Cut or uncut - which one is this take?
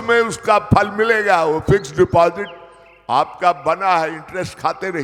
uncut